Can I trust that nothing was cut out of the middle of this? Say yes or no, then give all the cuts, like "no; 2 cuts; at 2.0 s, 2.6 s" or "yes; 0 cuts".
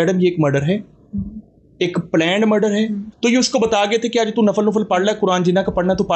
no; 1 cut; at 3.0 s